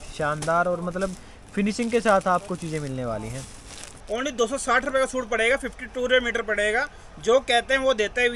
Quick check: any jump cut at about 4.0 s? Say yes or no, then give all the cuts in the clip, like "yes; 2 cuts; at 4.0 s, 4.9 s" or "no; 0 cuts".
yes; 1 cut; at 4.0 s